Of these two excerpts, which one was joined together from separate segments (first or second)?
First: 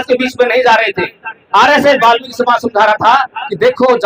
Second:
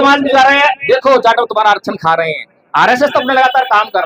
first